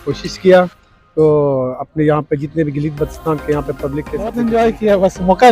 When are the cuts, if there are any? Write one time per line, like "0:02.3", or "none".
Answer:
0:04.3